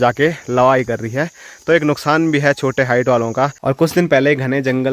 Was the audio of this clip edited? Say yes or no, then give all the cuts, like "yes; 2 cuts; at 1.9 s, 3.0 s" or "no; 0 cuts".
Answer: yes; 1 cut; at 3.6 s